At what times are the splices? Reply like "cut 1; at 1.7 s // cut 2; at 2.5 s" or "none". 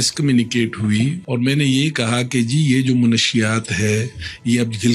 cut 1; at 1.2 s